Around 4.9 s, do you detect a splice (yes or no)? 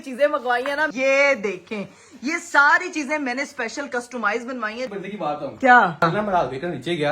yes